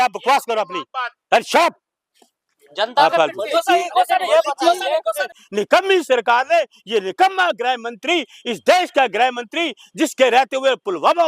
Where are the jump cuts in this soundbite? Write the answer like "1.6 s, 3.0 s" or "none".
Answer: 5.3 s